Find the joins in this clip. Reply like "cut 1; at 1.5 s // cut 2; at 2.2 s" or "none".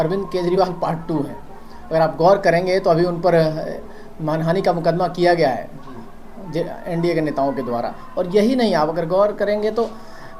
none